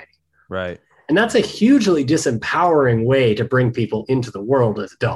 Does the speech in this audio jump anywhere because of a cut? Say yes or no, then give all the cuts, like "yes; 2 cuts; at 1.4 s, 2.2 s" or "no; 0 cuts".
no; 0 cuts